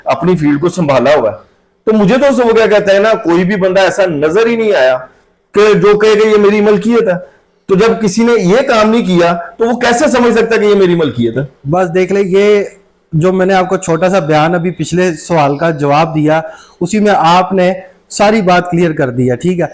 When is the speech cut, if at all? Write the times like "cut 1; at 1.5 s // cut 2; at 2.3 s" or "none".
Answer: none